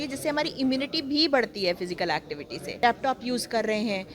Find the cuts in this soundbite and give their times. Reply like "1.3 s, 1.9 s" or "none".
2.7 s

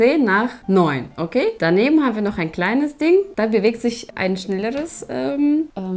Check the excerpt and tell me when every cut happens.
none

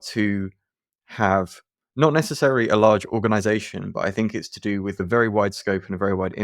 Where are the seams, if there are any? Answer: 5.0 s

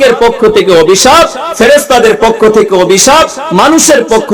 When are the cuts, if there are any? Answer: none

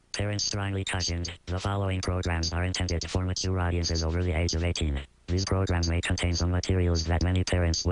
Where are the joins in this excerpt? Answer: 1.1 s

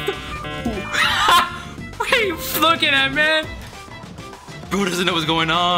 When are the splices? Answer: none

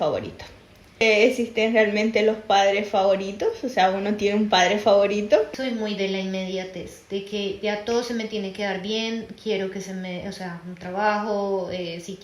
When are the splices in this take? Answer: 1.0 s, 5.5 s

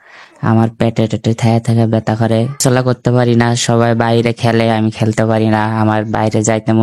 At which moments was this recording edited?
2.6 s

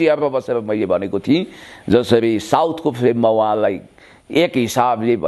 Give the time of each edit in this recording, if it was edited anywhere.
none

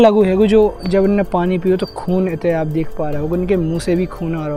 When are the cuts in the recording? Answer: none

